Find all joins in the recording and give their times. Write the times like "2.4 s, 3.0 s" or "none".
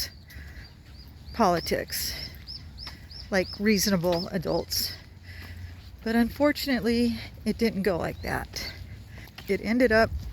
9.3 s